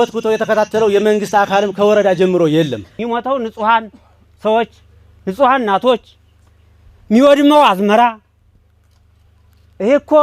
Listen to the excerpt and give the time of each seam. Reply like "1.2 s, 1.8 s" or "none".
2.9 s